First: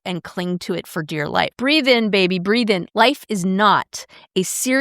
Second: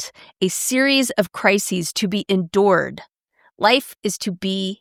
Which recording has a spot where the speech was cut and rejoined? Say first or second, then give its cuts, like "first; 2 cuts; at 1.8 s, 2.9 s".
first; 2 cuts; at 1.5 s, 2.9 s